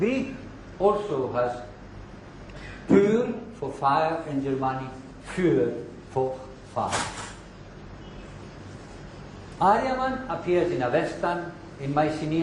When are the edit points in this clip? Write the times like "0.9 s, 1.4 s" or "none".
none